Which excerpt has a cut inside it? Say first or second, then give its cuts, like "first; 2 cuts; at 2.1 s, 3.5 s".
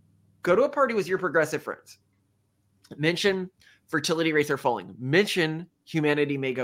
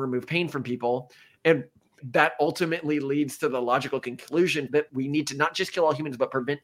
second; 2 cuts; at 2.0 s, 4.8 s